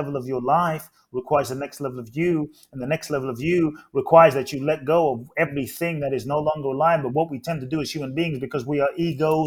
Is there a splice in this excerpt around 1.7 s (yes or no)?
no